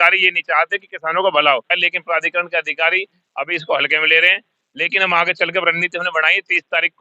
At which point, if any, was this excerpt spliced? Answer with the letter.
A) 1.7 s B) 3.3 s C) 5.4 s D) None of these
A